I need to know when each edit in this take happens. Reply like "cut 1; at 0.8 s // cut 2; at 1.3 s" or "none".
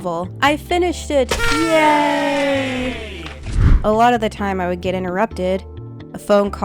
cut 1; at 3.6 s

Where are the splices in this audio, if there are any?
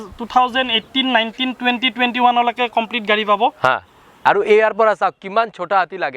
cut 1; at 4.2 s

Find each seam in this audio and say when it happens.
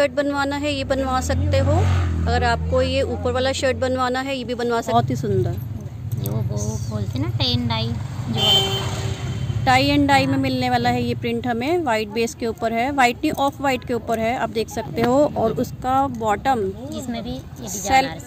cut 1; at 4.9 s

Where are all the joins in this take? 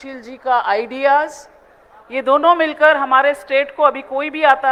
none

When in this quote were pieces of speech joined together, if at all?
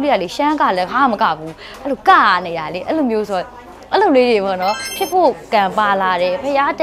cut 1; at 4.9 s

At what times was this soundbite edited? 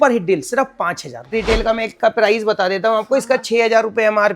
cut 1; at 1.3 s

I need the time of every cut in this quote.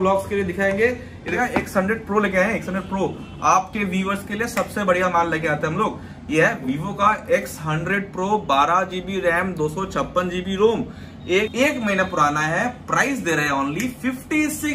cut 1; at 1.4 s // cut 2; at 11.5 s

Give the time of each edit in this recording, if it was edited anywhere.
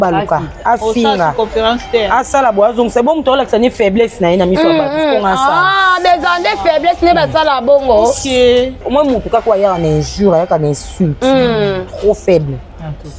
cut 1; at 8.8 s

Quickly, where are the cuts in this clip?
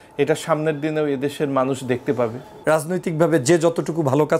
cut 1; at 2.5 s

